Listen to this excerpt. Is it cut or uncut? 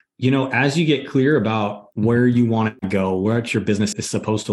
uncut